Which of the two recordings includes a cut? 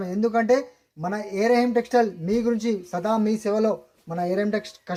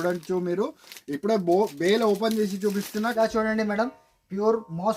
second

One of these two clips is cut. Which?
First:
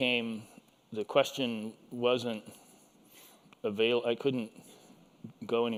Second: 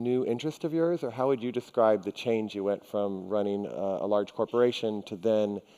second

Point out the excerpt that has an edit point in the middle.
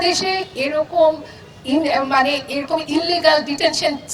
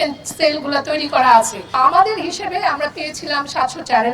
second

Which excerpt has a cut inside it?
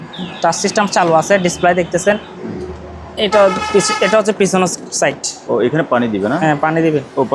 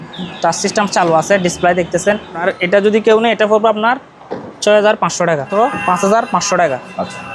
second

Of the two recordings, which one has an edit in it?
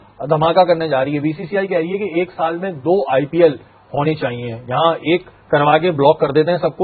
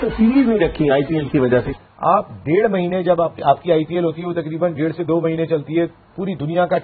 second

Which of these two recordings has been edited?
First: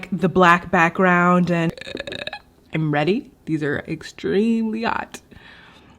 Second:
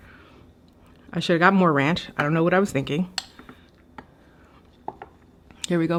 first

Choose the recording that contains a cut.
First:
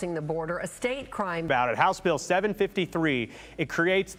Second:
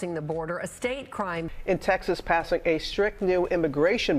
second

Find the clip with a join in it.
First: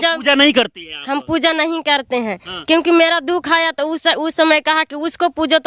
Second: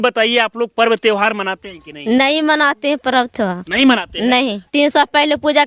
second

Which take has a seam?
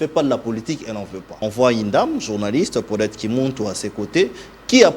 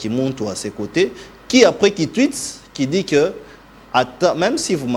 first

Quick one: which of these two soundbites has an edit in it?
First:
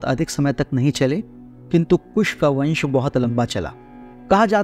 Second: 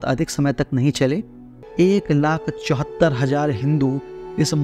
second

